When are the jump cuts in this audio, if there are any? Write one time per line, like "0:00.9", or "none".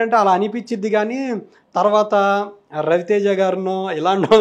none